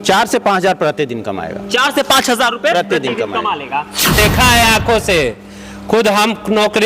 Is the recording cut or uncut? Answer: cut